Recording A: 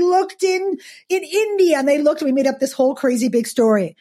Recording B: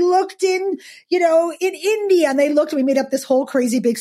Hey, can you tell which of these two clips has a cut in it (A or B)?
A